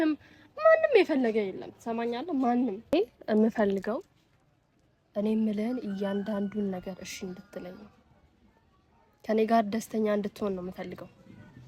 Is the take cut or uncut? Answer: cut